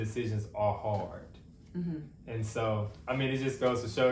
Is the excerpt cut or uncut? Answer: uncut